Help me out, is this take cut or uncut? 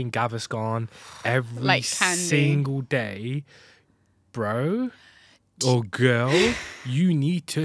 uncut